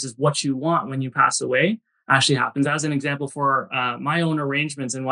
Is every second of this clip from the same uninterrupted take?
yes; 0 cuts

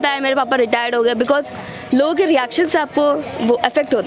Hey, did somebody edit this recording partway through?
no; 0 cuts

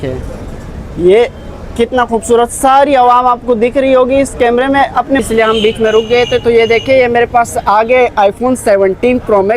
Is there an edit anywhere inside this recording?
yes; 1 cut; at 5.2 s

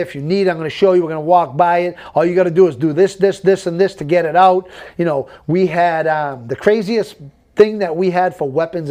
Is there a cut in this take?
no; 0 cuts

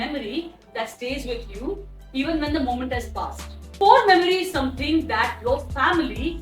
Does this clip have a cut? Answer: no; 0 cuts

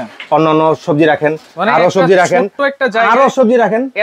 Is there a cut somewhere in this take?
no; 0 cuts

